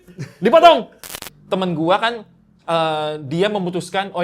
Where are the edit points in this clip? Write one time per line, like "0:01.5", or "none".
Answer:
0:01.3